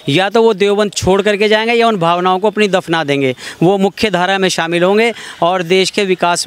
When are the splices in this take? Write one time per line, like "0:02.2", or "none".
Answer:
none